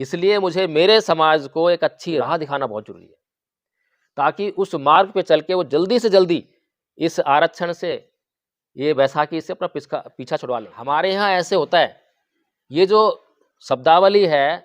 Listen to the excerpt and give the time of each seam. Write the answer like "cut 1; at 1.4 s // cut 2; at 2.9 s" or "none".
cut 1; at 2.2 s // cut 2; at 10.7 s